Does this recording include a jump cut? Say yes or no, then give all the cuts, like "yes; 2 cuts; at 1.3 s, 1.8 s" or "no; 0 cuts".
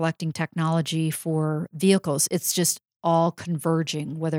no; 0 cuts